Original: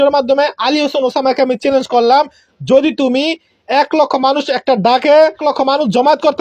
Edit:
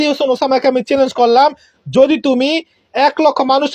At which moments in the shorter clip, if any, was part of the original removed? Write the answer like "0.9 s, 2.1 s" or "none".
none